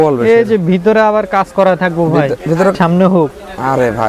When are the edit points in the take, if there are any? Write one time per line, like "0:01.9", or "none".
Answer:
0:02.7